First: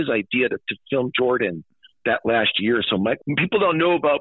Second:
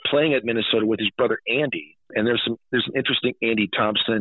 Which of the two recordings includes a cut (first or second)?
first